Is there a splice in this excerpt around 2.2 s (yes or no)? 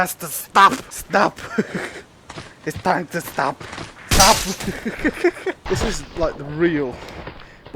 no